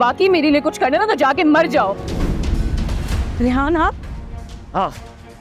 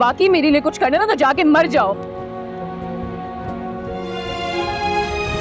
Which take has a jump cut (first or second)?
first